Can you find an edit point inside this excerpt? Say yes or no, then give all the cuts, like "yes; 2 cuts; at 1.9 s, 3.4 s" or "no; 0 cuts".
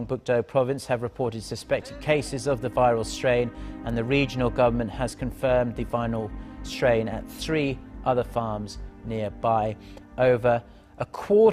no; 0 cuts